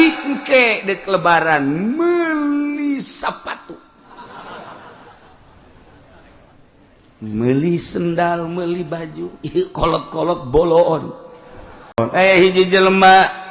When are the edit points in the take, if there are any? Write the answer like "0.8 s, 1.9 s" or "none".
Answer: 12.0 s